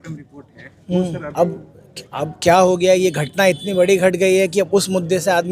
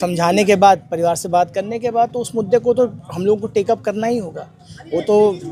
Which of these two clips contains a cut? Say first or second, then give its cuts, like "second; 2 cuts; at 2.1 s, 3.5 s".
first; 1 cut; at 1.3 s